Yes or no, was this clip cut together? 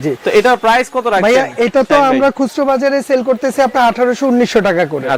no